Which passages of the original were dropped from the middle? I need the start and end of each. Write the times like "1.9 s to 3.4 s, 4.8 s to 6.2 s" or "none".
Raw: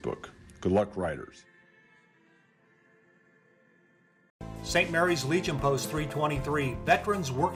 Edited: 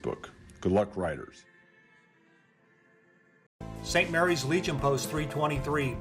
3.5 s to 4.3 s

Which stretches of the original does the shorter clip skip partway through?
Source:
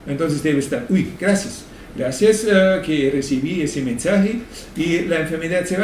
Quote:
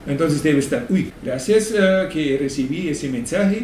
1.1 s to 1.8 s

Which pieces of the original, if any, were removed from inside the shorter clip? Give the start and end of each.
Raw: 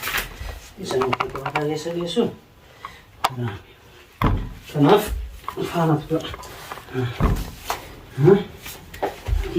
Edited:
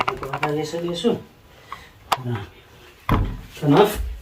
none

